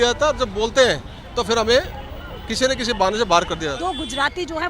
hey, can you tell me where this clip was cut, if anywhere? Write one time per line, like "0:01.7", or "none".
0:03.7